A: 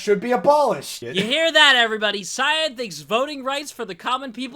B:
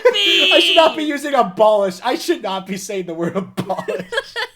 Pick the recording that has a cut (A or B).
A